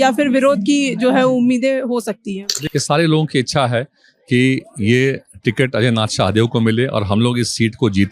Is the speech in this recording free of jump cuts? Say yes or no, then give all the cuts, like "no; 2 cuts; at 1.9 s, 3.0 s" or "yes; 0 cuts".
no; 1 cut; at 2.6 s